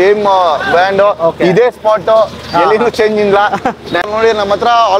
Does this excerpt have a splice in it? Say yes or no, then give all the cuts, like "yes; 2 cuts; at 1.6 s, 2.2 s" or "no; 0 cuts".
yes; 1 cut; at 4.0 s